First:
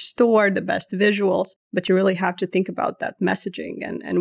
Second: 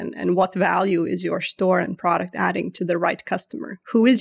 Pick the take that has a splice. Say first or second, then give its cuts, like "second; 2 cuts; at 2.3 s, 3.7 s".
first; 1 cut; at 1.6 s